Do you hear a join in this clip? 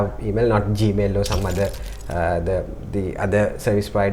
no; 0 cuts

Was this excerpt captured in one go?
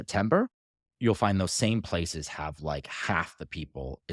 yes; 0 cuts

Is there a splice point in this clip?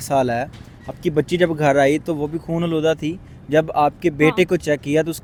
no; 0 cuts

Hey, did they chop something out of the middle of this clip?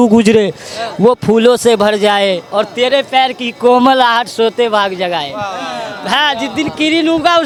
no; 0 cuts

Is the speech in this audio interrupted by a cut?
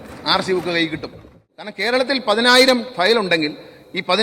yes; 1 cut; at 1.7 s

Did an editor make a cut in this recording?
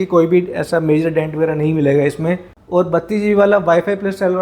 yes; 1 cut; at 2.6 s

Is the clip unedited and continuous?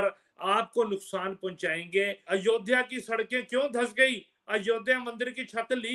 no; 1 cut; at 2.2 s

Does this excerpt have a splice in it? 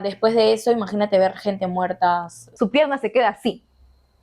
yes; 1 cut; at 2.4 s

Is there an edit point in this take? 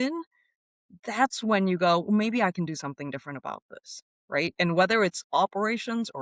no; 0 cuts

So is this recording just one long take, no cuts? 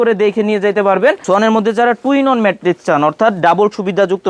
no; 1 cut; at 1.2 s

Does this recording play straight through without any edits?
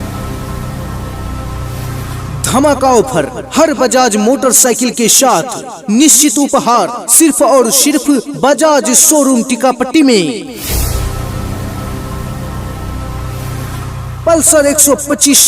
no; 4 cuts; at 2.4 s, 10.6 s, 12.2 s, 14.0 s

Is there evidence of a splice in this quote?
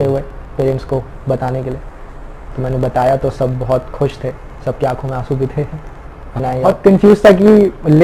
yes; 1 cut; at 6.7 s

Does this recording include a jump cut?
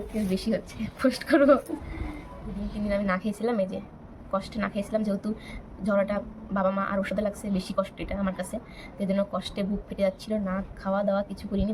yes; 1 cut; at 2.6 s

